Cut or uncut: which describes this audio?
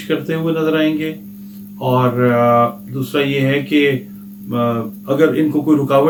uncut